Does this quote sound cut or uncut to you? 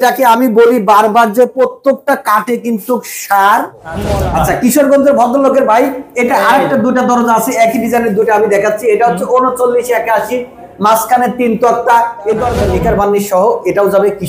cut